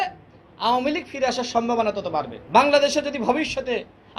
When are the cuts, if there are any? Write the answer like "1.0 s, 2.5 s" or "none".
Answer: 2.4 s